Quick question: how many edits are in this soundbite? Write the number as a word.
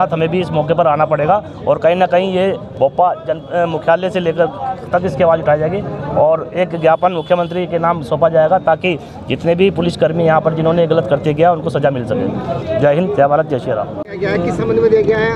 one